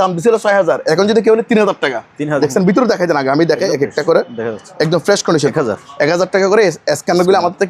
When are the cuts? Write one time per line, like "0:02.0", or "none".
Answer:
0:02.3
0:05.5